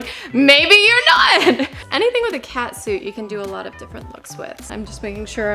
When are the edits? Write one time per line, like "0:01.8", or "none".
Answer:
0:01.8
0:04.7